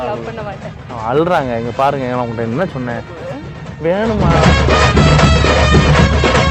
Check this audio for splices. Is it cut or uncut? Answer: uncut